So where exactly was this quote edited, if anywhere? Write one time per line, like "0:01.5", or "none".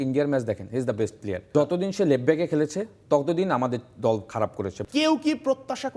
0:01.4
0:04.8